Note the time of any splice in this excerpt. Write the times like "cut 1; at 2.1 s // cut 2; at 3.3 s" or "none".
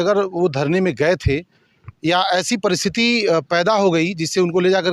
none